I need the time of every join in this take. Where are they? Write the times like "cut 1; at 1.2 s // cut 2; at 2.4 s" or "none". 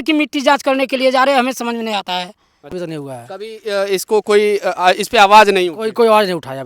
cut 1; at 2.7 s